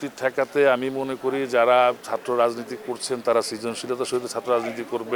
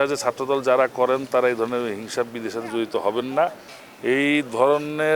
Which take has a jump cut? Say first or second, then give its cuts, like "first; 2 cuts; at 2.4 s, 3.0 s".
second; 1 cut; at 3.7 s